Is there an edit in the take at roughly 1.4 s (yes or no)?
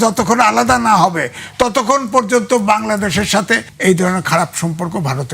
no